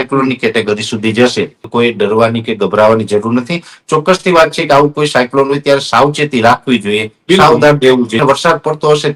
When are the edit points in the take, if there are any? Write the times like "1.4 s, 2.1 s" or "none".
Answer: 1.6 s, 8.2 s